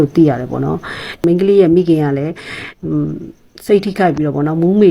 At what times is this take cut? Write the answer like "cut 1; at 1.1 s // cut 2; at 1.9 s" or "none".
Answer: cut 1; at 1.1 s

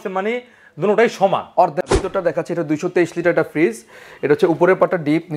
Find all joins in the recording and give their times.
cut 1; at 2.0 s

